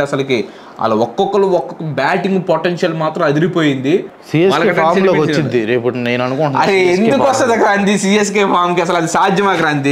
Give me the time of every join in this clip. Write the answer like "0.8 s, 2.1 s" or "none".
4.2 s